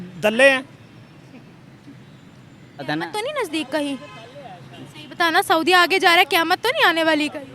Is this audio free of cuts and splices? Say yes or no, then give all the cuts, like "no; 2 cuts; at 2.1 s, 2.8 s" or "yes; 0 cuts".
no; 1 cut; at 2.9 s